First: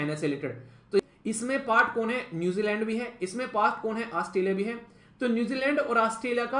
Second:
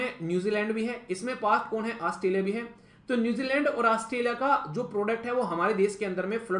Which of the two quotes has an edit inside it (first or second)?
first